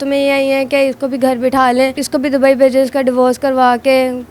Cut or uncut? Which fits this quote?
cut